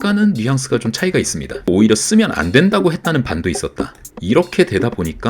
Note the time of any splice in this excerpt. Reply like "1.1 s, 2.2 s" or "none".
1.7 s